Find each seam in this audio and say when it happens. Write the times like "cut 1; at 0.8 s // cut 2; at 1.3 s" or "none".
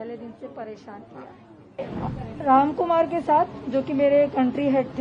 cut 1; at 2.0 s